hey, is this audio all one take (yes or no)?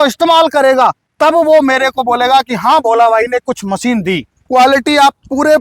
no